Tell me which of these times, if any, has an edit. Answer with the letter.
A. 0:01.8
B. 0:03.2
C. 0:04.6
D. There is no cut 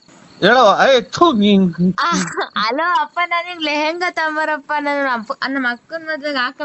A